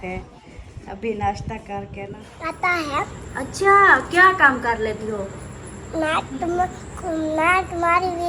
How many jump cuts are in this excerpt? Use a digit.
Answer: 1